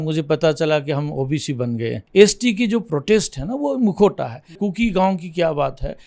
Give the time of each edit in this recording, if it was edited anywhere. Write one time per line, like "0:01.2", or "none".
0:02.0
0:04.6